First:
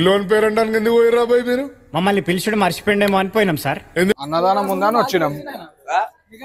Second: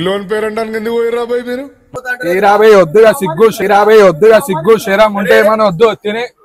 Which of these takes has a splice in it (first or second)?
second